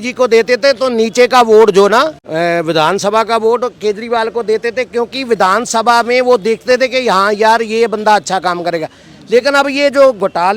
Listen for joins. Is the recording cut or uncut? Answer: cut